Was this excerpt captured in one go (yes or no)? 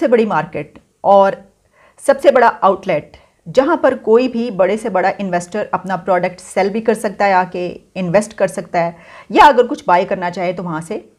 yes